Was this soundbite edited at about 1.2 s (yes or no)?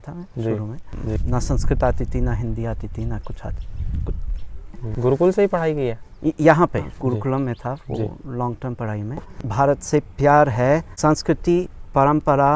yes